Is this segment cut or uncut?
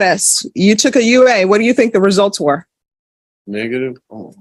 uncut